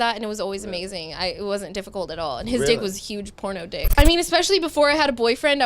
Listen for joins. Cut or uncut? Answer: cut